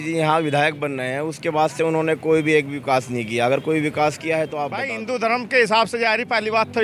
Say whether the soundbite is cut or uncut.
cut